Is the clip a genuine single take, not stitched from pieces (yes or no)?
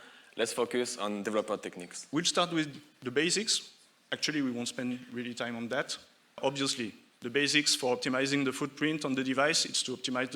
no